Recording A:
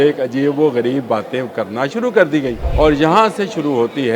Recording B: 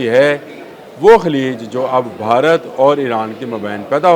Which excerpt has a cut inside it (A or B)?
A